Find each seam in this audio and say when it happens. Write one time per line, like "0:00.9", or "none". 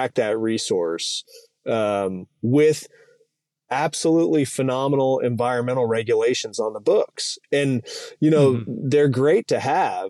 none